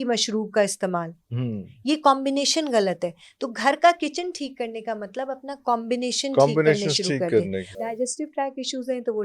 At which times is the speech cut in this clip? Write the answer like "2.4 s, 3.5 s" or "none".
7.7 s